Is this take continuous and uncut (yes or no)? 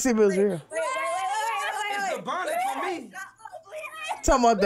yes